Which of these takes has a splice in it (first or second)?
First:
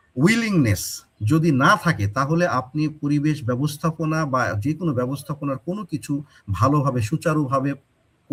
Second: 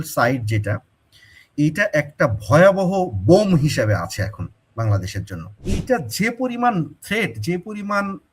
second